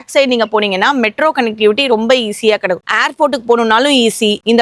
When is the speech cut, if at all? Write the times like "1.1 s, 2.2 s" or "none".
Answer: none